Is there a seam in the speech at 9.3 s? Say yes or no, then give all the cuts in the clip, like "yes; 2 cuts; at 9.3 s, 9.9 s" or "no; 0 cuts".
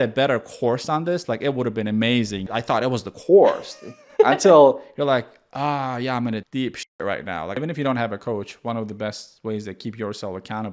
no; 1 cut; at 7.6 s